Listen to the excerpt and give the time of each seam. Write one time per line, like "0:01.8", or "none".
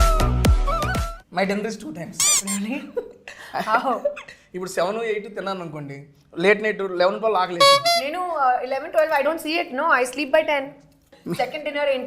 0:01.1
0:11.2